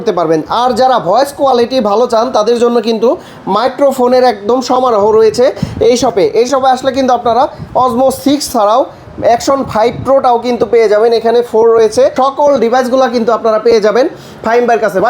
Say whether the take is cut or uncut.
uncut